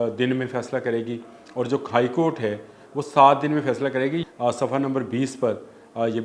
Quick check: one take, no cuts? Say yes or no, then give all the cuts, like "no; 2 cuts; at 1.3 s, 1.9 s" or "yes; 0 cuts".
no; 1 cut; at 4.2 s